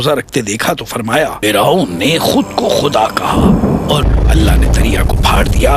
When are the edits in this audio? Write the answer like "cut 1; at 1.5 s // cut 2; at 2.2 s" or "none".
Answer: cut 1; at 1.4 s // cut 2; at 4.0 s